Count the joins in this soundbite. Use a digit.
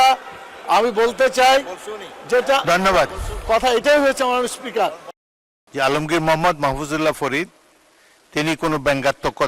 1